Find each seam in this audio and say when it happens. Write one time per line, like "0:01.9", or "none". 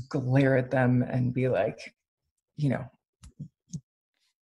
none